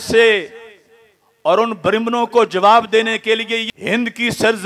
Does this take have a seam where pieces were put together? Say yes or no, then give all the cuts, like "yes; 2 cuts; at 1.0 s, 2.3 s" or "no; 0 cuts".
yes; 1 cut; at 3.7 s